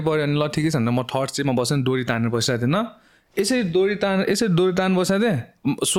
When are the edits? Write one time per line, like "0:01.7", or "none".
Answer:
none